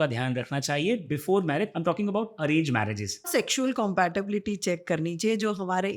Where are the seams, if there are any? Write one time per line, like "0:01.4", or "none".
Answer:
0:01.7
0:03.3